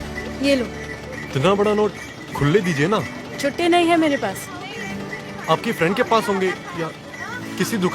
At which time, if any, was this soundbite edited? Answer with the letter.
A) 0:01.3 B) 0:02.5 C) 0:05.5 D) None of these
A